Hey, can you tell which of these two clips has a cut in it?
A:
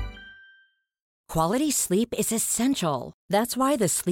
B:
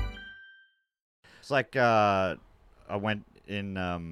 B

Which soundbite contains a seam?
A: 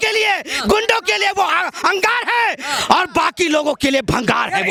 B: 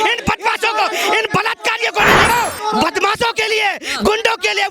B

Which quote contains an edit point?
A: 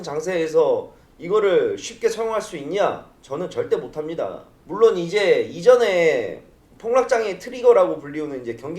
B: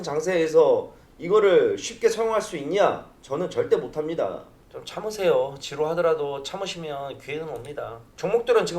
B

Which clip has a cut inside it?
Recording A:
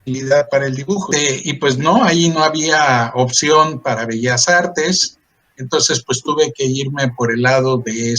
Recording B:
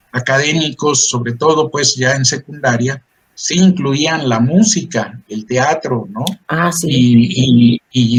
A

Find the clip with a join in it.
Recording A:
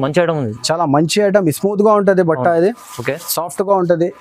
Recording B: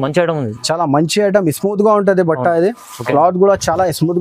B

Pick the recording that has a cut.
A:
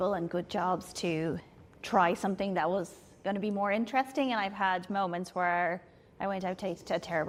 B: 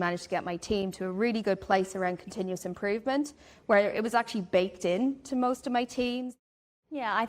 B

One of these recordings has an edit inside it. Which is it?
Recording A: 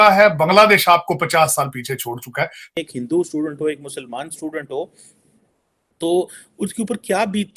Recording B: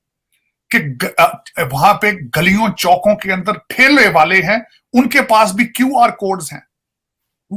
A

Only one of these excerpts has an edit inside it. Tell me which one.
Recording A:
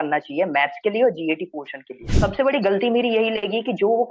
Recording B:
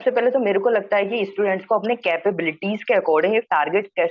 A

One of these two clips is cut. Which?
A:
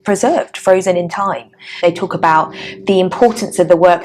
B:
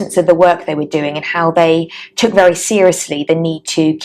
A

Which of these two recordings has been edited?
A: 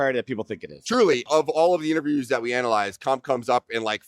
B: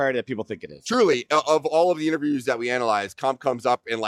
A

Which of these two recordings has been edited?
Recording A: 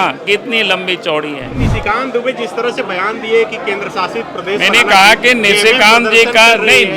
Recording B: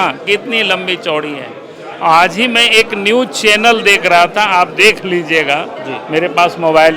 A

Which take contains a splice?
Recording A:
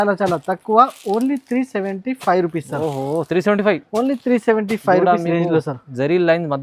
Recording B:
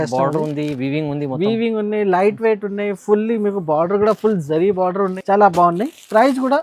B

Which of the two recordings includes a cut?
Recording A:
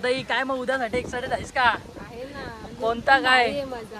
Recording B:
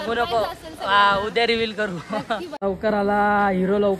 B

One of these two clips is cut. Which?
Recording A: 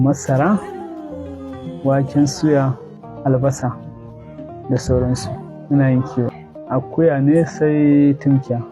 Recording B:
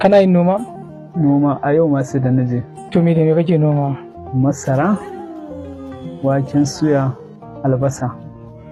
A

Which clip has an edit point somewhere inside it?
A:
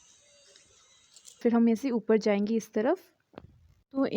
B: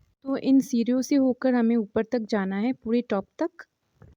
A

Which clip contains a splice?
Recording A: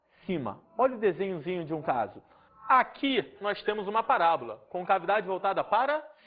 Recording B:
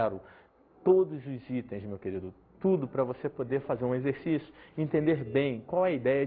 B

